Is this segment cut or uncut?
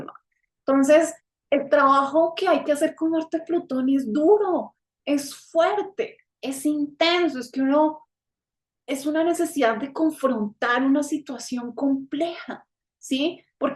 uncut